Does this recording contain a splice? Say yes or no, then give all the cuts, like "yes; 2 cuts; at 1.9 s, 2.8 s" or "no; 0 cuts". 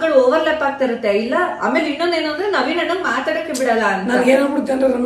no; 0 cuts